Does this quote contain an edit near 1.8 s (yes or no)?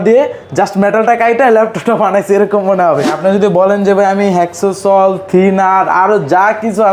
no